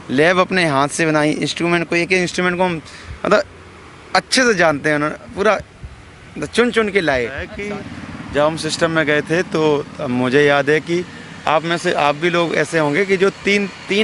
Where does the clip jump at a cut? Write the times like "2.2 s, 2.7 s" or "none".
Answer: 7.5 s